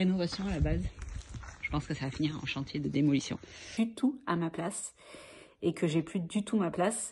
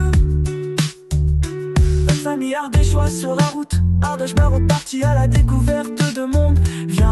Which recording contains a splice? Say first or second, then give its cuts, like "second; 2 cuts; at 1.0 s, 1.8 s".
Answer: first; 1 cut; at 3.7 s